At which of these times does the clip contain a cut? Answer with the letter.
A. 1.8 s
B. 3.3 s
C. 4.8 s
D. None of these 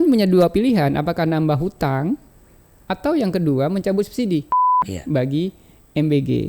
C